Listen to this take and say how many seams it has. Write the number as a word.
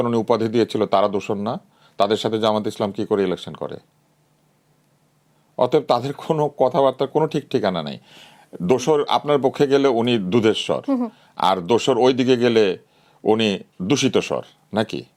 zero